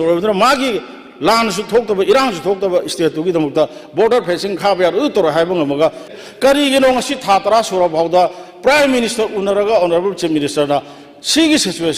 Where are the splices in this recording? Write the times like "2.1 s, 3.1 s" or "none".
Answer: 6.1 s